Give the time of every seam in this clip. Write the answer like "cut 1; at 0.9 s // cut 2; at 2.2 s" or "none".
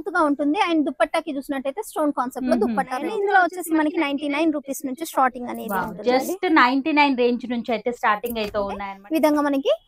cut 1; at 3.0 s // cut 2; at 8.9 s